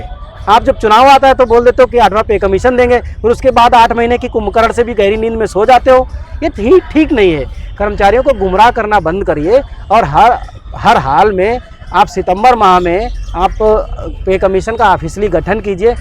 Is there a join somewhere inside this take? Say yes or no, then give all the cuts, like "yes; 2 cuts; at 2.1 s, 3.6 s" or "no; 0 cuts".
no; 0 cuts